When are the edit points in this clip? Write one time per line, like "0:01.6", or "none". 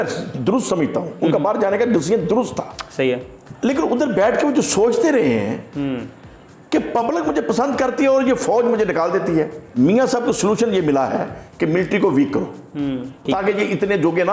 0:03.4
0:09.6
0:13.2